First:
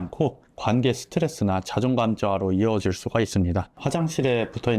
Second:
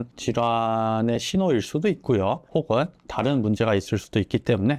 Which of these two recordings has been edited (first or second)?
first